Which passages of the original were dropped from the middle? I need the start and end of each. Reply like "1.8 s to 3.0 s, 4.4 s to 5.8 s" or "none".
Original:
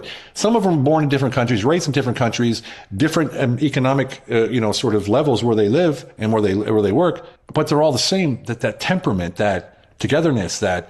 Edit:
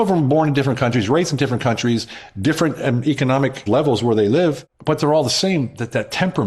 4.2 s to 5.0 s, 6.1 s to 7.4 s